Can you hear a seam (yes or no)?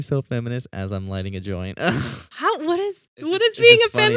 yes